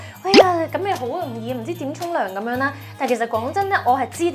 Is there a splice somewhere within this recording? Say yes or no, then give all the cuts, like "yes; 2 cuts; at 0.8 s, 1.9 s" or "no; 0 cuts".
no; 0 cuts